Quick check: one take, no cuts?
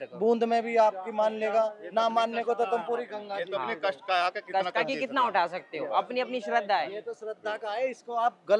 yes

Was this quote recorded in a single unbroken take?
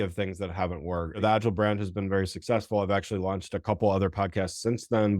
no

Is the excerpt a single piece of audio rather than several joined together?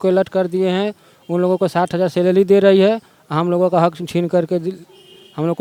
yes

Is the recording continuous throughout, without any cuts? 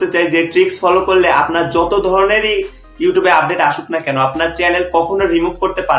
yes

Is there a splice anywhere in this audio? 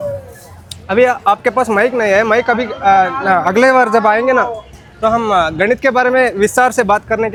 no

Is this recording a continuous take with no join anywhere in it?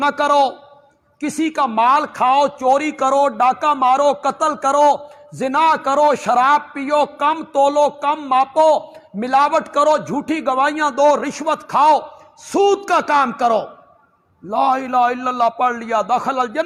yes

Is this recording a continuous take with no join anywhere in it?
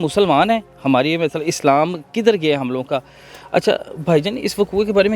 yes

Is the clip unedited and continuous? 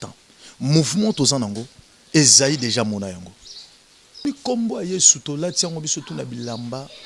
no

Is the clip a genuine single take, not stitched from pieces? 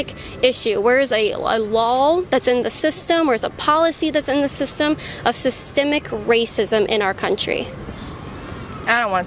yes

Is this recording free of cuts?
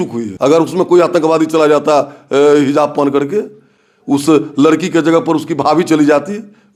yes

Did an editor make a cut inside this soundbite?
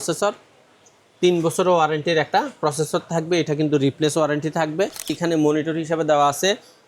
yes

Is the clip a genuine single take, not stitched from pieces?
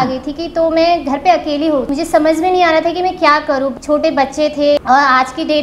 no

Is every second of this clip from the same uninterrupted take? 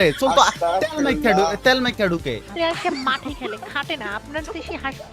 no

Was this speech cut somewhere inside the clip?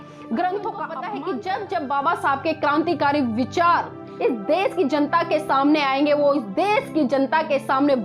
yes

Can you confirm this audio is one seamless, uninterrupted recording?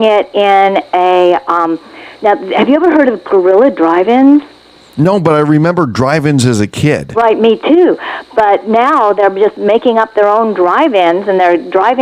yes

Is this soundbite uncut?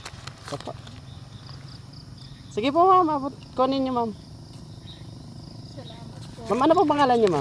yes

